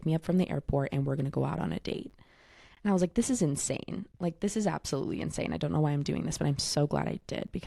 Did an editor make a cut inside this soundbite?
no; 0 cuts

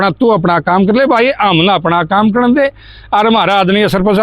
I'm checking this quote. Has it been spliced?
no; 0 cuts

